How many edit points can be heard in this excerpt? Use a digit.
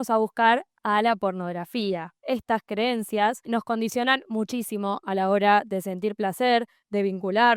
2